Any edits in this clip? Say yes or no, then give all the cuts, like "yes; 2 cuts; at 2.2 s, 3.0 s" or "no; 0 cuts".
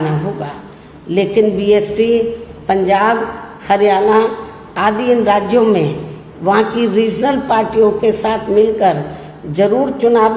no; 0 cuts